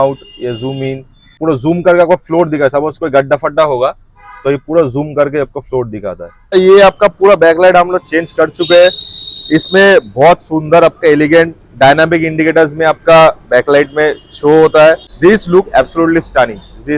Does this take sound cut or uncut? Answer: cut